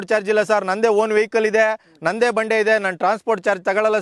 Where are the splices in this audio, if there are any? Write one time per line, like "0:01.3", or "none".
none